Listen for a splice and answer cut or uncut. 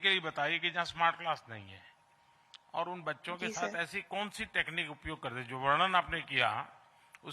uncut